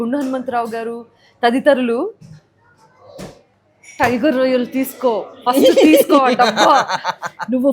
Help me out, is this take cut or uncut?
uncut